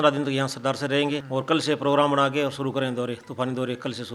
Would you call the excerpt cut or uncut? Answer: uncut